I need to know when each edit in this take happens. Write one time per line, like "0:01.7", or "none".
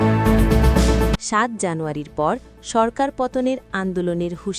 0:01.2